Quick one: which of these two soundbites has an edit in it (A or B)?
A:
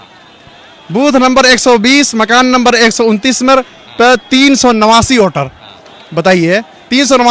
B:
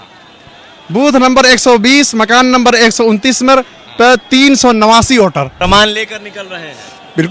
B